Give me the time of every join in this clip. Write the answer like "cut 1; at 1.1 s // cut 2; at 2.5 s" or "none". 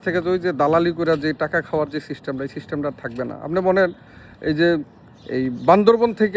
none